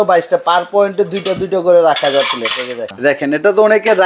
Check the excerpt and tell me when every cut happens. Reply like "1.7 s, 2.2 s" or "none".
2.9 s

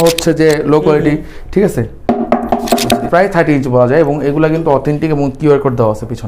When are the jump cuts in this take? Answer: 3.1 s

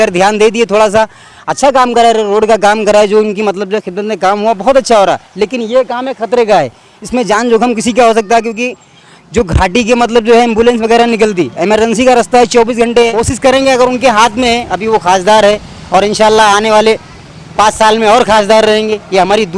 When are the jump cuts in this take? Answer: 13.1 s

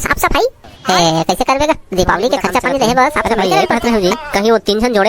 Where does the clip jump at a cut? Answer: 3.7 s

